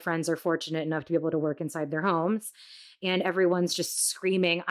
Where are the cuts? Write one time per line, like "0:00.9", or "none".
none